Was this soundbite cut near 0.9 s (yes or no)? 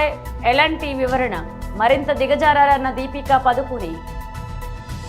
no